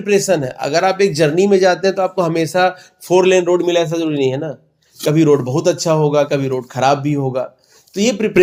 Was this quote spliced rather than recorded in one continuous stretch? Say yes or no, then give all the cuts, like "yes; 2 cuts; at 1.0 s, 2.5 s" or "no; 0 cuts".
no; 0 cuts